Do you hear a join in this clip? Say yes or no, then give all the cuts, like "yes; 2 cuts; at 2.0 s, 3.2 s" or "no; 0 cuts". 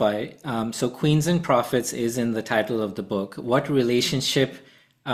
no; 0 cuts